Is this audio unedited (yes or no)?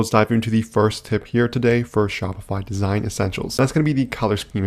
no